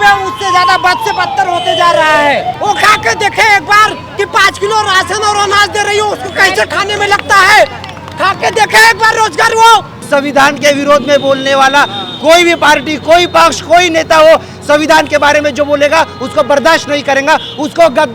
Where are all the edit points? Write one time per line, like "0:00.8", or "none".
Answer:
0:02.5
0:10.0